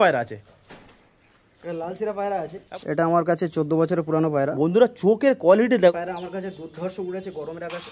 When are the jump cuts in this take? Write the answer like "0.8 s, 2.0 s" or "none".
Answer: 2.6 s, 5.9 s